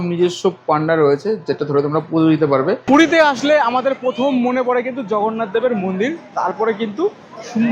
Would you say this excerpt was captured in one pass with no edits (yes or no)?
no